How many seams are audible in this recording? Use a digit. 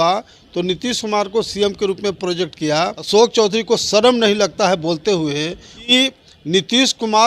2